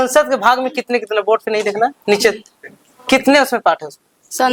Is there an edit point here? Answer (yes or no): no